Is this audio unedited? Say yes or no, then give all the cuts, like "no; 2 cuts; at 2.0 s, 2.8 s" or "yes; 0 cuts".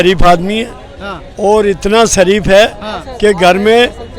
yes; 0 cuts